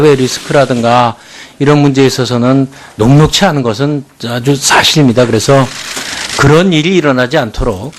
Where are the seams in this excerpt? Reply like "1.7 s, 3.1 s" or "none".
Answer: 6.8 s